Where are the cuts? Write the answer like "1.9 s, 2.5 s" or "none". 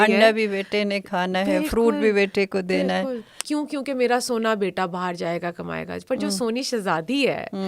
3.2 s

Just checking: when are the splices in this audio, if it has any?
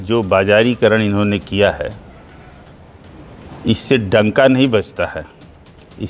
none

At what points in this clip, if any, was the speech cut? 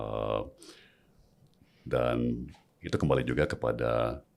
none

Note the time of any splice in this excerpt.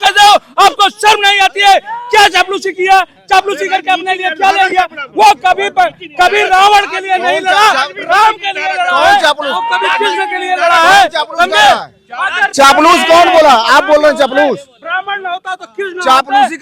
none

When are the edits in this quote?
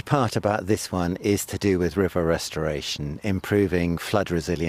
none

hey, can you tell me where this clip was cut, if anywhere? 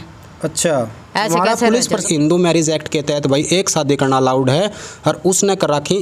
2.0 s

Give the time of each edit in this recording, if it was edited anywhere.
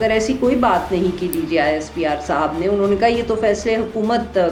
none

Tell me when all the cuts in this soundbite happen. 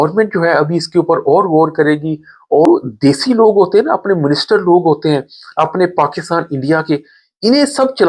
2.7 s

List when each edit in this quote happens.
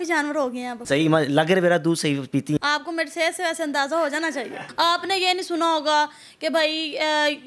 4.6 s

